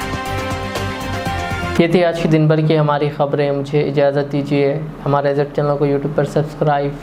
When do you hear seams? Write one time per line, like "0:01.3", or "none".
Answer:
none